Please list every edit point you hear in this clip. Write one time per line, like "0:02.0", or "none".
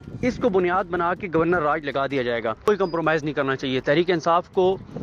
0:02.7